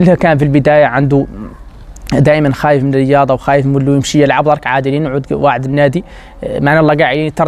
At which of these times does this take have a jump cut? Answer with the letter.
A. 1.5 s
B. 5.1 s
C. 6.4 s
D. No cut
D